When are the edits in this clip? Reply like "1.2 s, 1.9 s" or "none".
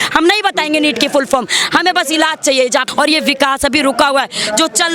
2.8 s